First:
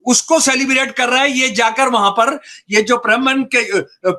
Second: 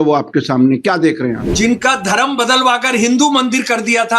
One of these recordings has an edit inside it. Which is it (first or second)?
second